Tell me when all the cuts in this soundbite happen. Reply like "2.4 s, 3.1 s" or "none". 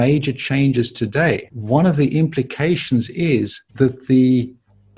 1.5 s, 3.6 s